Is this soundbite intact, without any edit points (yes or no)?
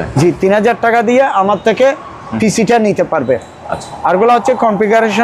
yes